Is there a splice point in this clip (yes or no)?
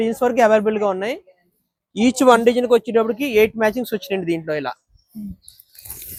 no